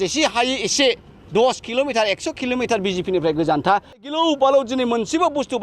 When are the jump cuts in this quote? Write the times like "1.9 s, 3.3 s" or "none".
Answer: 4.0 s